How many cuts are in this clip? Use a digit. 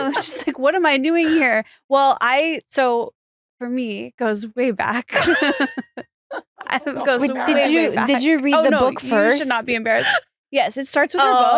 0